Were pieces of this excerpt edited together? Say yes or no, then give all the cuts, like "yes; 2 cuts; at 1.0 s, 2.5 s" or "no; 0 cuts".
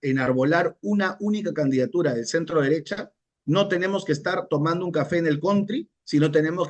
no; 0 cuts